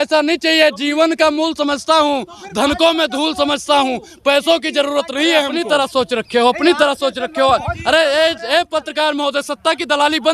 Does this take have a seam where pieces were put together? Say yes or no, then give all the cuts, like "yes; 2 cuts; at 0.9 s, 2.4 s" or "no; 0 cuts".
yes; 1 cut; at 5.7 s